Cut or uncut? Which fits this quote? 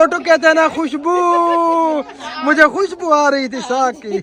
uncut